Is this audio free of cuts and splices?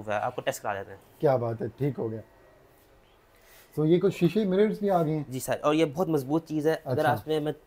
yes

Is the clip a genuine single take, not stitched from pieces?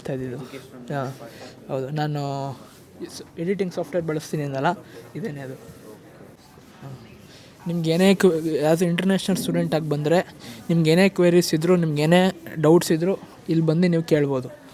yes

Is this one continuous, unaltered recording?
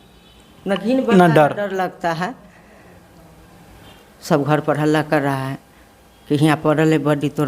no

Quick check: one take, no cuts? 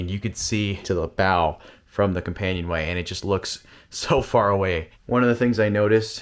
no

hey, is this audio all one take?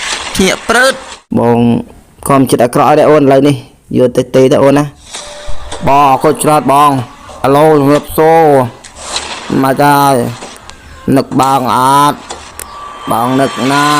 no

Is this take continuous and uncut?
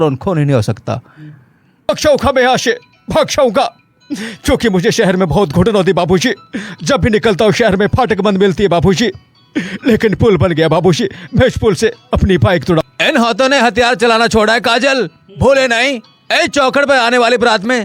no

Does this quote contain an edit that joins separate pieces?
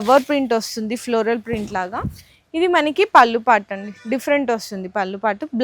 no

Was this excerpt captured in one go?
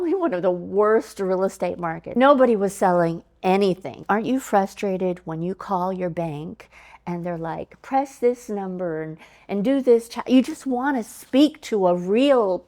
no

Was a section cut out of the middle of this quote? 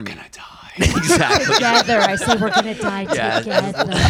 no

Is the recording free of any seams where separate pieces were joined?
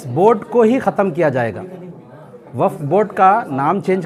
yes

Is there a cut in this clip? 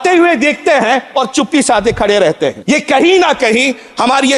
yes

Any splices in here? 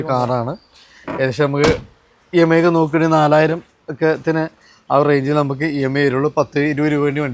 no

